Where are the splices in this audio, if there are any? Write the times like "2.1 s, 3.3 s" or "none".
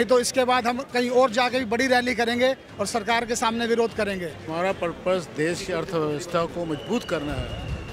4.4 s